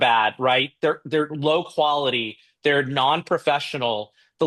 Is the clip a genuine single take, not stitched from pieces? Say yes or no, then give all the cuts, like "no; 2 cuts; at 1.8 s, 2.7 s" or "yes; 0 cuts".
yes; 0 cuts